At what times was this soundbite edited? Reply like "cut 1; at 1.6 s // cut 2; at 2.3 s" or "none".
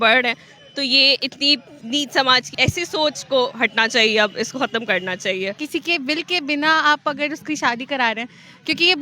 cut 1; at 1.7 s // cut 2; at 2.5 s // cut 3; at 5.6 s

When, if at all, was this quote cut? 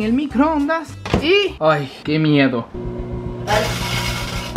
cut 1; at 2.7 s

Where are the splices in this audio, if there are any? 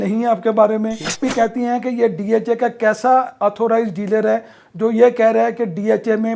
cut 1; at 1.3 s

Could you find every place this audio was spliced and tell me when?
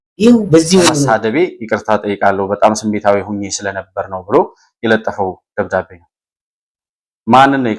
cut 1; at 1.0 s

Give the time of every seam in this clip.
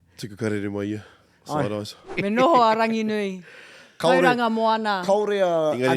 cut 1; at 2.0 s

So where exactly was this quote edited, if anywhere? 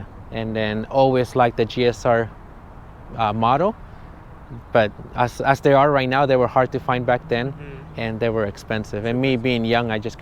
none

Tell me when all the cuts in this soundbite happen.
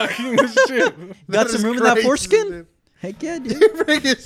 cut 1; at 1.1 s

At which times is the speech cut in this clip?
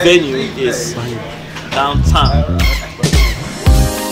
cut 1; at 2.2 s

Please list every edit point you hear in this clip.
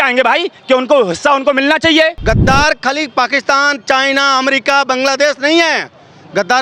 cut 1; at 2.2 s

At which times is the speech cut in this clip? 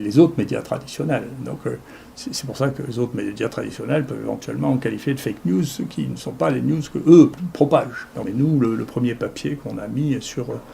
cut 1; at 8.3 s

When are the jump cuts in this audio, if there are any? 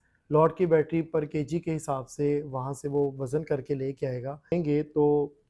cut 1; at 4.5 s

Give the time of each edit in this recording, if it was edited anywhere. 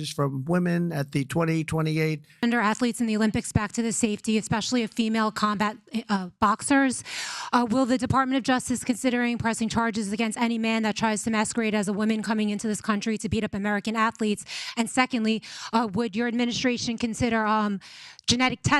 cut 1; at 2.3 s

